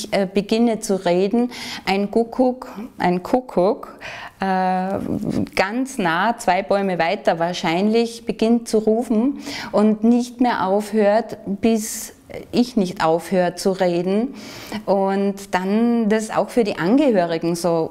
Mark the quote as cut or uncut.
uncut